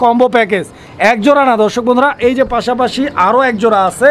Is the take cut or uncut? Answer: uncut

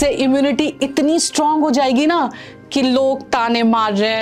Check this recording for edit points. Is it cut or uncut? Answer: uncut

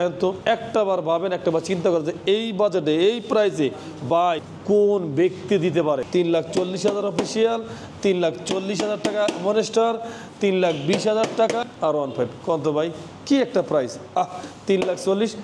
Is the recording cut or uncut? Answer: uncut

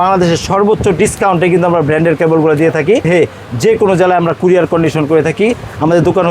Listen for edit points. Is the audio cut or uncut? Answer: cut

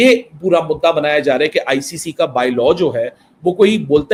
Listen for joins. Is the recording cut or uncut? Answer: uncut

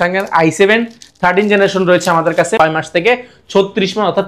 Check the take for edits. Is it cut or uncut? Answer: cut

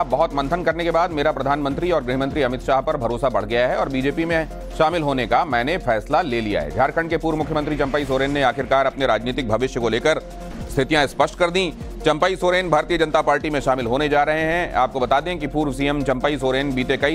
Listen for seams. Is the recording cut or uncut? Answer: cut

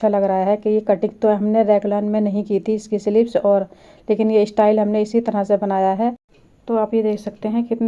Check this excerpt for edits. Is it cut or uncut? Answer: cut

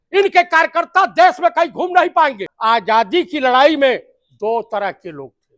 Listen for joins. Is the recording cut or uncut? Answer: cut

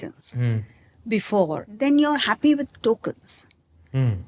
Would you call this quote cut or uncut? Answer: cut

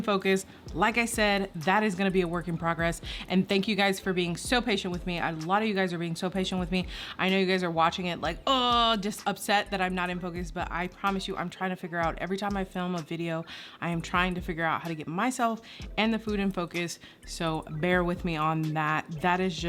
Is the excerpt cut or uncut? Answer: uncut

